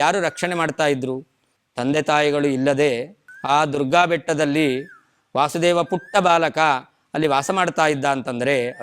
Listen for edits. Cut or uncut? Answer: cut